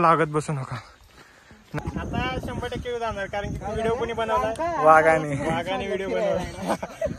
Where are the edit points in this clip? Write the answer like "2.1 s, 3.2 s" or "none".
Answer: 1.7 s